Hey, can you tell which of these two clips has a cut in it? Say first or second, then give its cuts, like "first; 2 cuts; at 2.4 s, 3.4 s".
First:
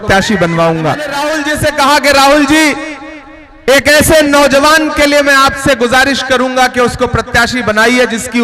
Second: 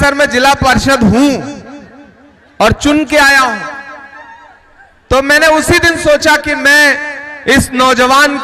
first; 1 cut; at 1.2 s